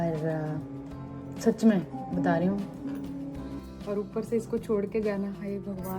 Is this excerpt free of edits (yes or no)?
no